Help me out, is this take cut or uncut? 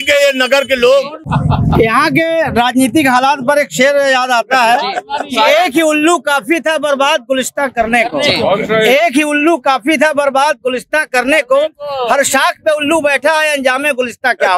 cut